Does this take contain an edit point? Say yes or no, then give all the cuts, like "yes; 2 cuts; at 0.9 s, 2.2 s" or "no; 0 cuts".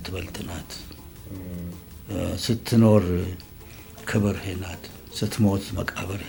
no; 0 cuts